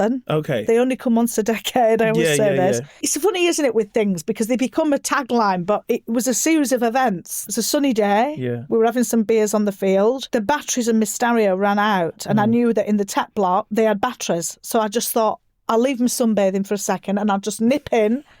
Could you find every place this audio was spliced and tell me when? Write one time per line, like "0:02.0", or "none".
0:03.1
0:07.4
0:10.2
0:13.7